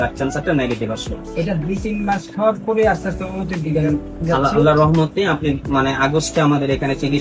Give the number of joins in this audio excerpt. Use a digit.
0